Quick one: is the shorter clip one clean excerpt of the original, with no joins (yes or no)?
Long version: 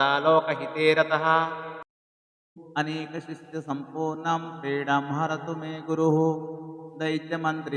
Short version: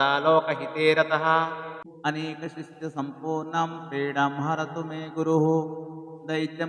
no